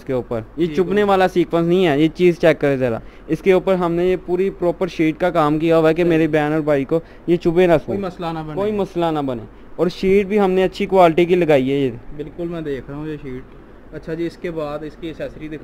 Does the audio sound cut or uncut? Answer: uncut